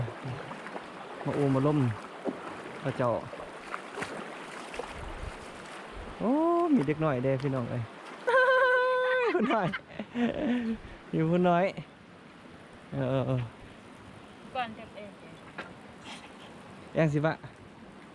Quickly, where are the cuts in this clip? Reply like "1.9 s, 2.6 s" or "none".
8.3 s